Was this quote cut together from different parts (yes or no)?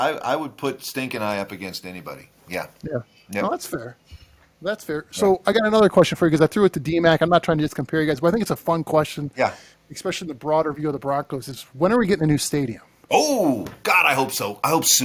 no